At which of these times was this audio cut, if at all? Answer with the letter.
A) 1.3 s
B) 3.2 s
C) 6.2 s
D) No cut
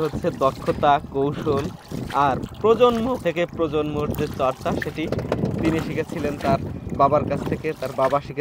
B